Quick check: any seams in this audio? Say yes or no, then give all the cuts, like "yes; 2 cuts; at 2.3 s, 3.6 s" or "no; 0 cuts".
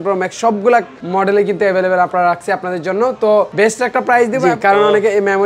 yes; 3 cuts; at 1.0 s, 3.5 s, 4.4 s